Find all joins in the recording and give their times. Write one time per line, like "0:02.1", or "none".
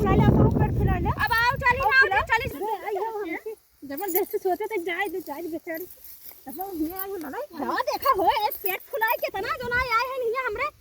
0:02.5